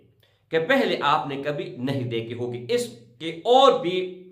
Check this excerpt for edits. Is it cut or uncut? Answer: uncut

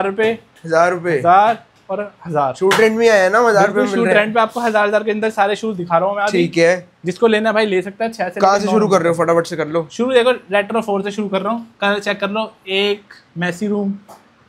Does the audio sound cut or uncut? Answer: uncut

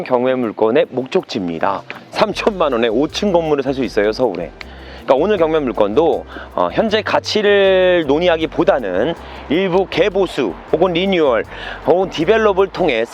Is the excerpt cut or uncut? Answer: cut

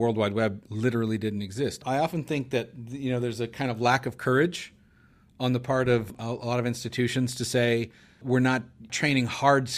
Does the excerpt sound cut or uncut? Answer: cut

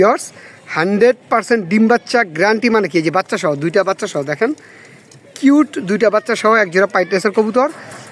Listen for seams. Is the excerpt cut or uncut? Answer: uncut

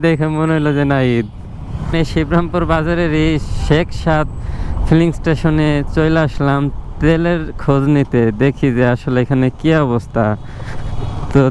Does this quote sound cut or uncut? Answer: cut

